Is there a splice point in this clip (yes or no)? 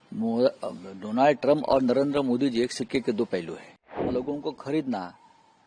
yes